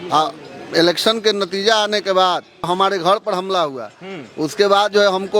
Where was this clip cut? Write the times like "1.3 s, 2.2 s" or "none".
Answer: 2.7 s